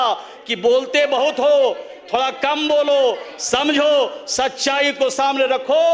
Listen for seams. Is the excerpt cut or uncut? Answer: uncut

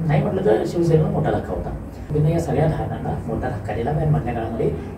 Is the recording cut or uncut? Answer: cut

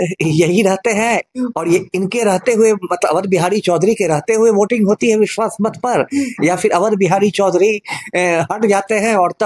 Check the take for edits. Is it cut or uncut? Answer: uncut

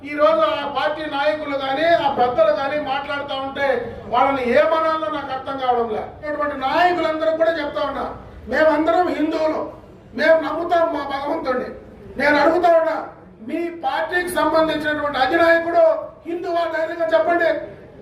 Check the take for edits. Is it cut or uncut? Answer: cut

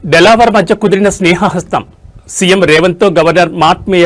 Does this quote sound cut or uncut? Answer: uncut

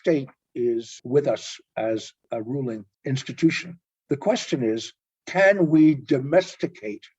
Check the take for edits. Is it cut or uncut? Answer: cut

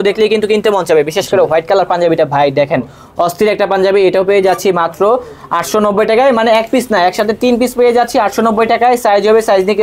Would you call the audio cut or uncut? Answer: uncut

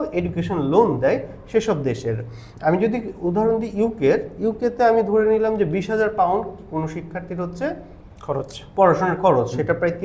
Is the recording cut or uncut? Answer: uncut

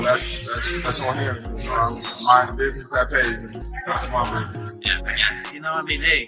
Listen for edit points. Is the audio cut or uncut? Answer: cut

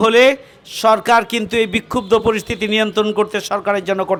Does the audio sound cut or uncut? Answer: uncut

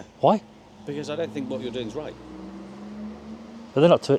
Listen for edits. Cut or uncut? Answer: uncut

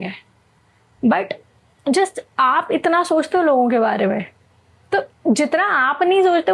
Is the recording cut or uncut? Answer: uncut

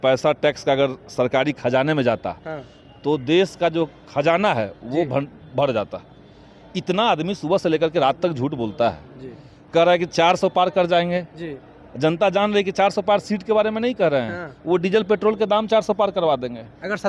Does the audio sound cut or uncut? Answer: uncut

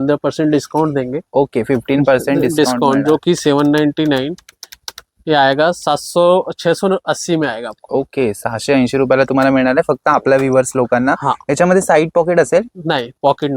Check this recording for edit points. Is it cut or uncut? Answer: uncut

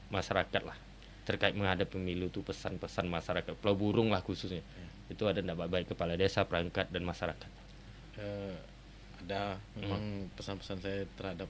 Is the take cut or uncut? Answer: uncut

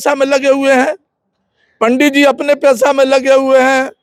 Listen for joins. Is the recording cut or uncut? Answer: uncut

